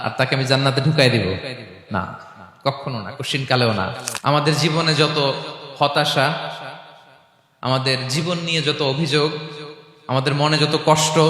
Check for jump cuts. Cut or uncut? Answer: cut